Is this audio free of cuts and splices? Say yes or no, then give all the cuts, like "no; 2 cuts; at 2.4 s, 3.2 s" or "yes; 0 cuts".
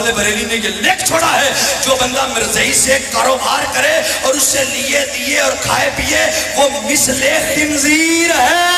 yes; 0 cuts